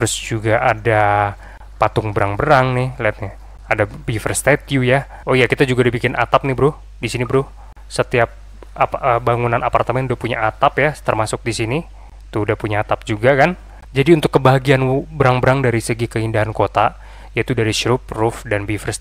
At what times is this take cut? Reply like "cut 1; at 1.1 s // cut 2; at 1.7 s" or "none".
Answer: cut 1; at 5.1 s // cut 2; at 13.9 s